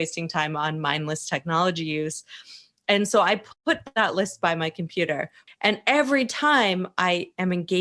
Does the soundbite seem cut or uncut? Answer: cut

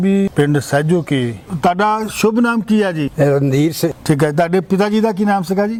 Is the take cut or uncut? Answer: uncut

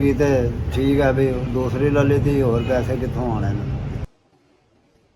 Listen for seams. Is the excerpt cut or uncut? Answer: cut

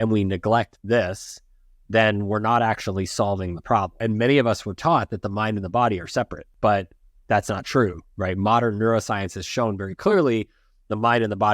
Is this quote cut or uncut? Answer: cut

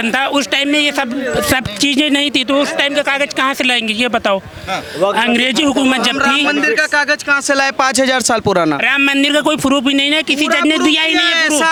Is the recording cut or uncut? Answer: uncut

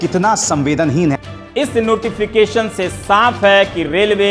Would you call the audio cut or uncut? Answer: cut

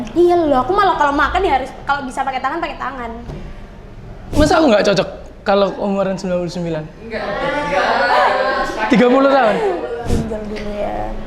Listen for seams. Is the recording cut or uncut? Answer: cut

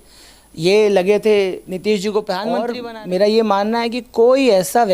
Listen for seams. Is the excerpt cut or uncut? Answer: cut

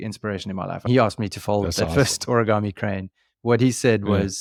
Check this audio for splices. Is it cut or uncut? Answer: uncut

